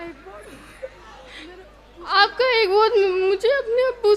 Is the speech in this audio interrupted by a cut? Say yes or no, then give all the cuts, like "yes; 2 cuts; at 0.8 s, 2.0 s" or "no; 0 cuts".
no; 0 cuts